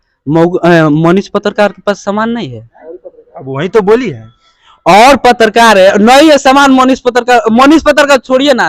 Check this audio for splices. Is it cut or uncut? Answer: uncut